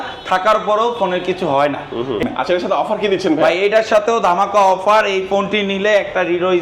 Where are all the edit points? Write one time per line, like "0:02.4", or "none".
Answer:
0:02.2

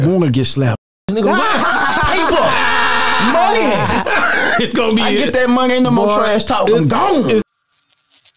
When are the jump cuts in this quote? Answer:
0:07.5

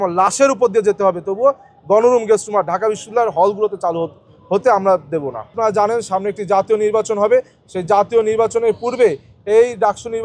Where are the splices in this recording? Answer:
0:05.4

